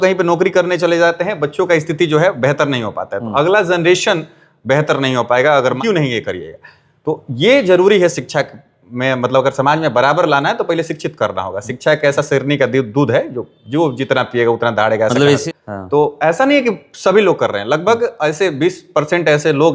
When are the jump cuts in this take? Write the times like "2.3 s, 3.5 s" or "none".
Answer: 5.8 s, 15.5 s